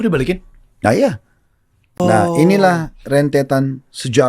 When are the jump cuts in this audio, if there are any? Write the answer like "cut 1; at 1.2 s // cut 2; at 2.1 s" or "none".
cut 1; at 2.0 s